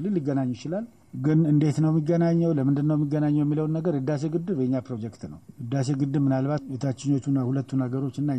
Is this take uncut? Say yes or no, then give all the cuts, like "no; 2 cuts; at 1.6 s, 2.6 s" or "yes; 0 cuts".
no; 1 cut; at 7.0 s